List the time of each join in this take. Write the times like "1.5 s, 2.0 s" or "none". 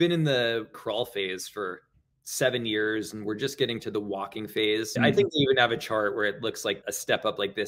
5.0 s